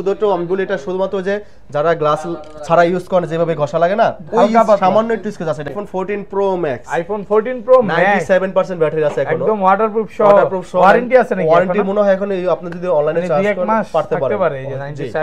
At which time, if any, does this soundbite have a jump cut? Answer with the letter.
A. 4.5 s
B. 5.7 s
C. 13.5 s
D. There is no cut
B